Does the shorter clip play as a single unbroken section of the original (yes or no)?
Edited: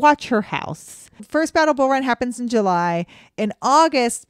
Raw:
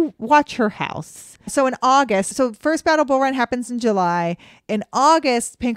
no